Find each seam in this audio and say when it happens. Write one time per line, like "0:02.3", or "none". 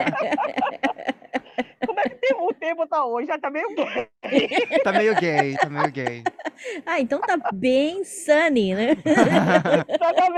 none